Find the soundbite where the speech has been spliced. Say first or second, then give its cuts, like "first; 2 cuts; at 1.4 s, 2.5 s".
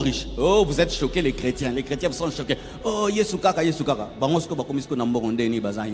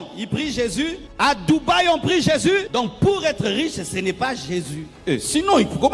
second; 3 cuts; at 1.0 s, 2.7 s, 4.8 s